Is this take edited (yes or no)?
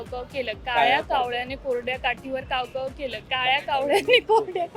no